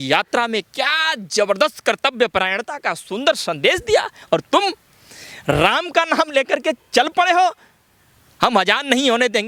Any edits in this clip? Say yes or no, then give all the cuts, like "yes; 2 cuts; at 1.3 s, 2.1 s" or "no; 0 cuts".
no; 0 cuts